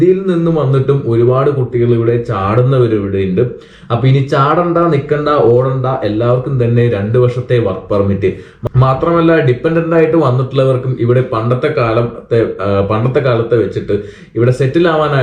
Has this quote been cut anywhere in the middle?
no; 0 cuts

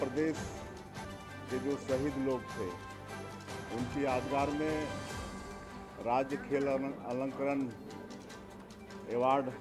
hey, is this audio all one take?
yes; 0 cuts

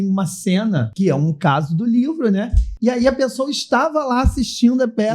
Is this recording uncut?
no; 2 cuts; at 0.9 s, 2.6 s

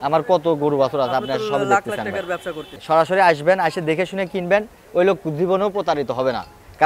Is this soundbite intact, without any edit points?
no; 1 cut; at 2.8 s

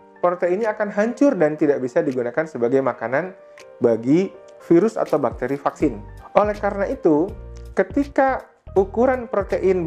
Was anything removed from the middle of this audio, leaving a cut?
no; 0 cuts

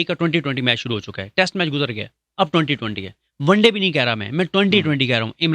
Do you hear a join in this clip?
no; 0 cuts

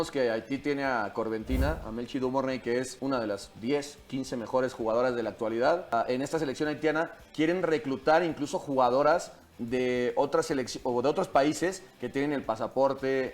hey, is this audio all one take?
no; 2 cuts; at 2.9 s, 5.9 s

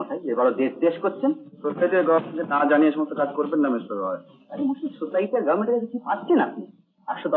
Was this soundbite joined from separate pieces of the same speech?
no; 0 cuts

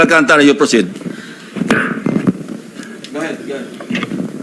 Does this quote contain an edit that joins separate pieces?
no; 0 cuts

